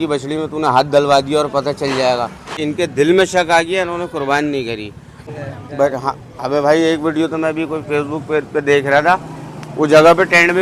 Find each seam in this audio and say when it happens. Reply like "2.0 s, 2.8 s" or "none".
2.6 s, 5.2 s